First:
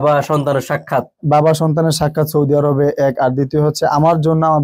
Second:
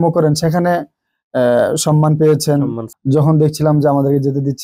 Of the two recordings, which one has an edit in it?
second; 1 cut; at 2.8 s

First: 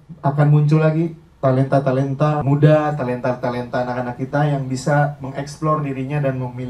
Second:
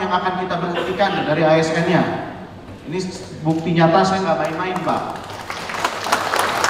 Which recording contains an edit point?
first; 1 cut; at 2.4 s

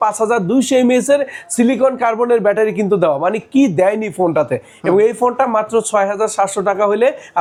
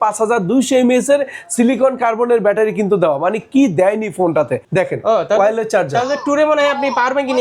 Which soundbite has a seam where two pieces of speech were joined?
second; 1 cut; at 4.6 s

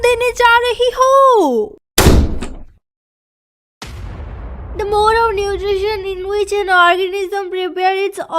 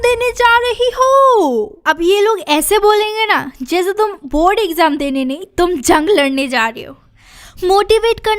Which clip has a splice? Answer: first; 1 cut; at 1.8 s

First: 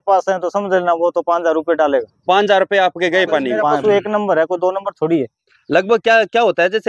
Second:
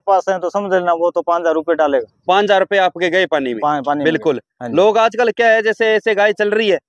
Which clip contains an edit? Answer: first; 1 cut; at 3.8 s

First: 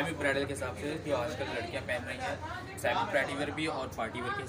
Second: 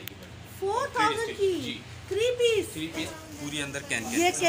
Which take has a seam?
second; 1 cut; at 3.1 s

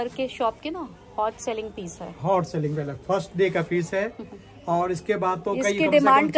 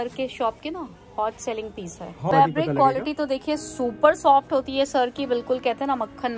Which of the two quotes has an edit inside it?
second; 1 cut; at 2.3 s

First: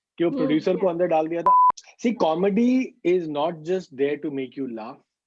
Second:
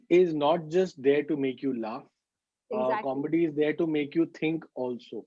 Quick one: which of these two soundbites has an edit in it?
first; 1 cut; at 1.6 s

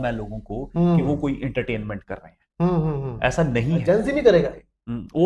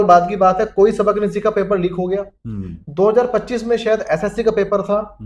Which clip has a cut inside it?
first; 1 cut; at 3.8 s

